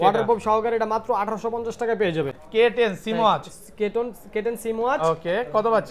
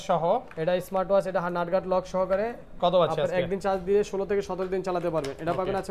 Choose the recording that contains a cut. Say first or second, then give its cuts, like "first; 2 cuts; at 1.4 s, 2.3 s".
first; 1 cut; at 2.3 s